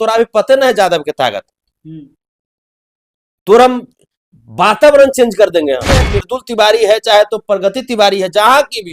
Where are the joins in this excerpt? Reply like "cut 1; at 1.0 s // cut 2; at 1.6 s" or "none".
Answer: cut 1; at 6.1 s

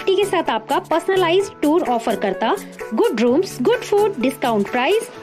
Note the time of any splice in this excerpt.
none

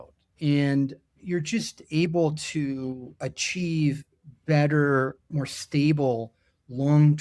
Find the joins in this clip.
cut 1; at 1.1 s // cut 2; at 3.1 s // cut 3; at 5.3 s

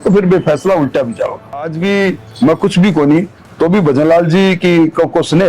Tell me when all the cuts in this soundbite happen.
cut 1; at 1.7 s

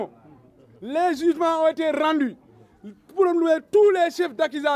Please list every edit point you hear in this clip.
none

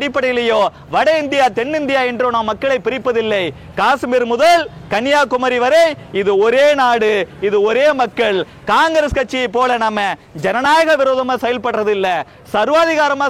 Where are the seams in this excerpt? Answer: none

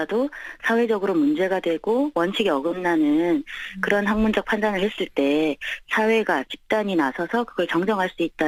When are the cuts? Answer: none

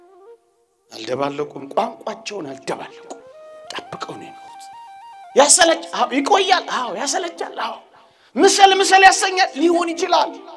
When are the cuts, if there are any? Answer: cut 1; at 0.9 s

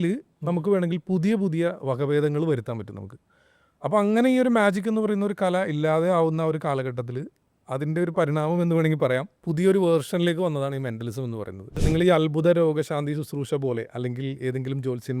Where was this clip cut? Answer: cut 1; at 11.7 s

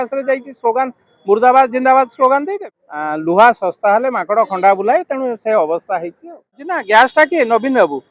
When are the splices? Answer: cut 1; at 2.6 s // cut 2; at 6.8 s

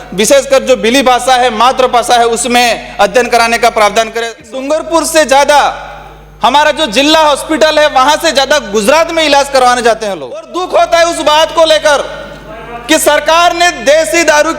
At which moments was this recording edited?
cut 1; at 4.4 s // cut 2; at 10.6 s

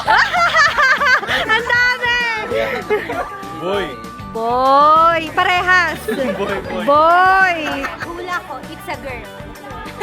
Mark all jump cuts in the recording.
cut 1; at 8.0 s

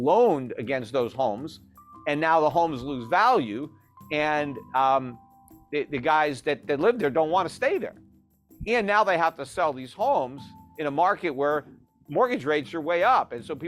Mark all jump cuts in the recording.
none

